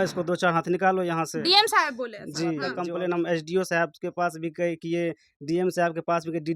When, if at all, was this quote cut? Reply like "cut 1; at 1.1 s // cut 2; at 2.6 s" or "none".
cut 1; at 2.7 s